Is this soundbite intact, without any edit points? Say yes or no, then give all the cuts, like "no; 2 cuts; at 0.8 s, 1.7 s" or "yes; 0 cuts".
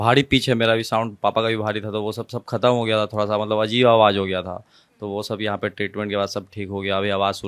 yes; 0 cuts